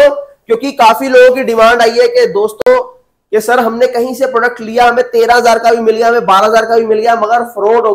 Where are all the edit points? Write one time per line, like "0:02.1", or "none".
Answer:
none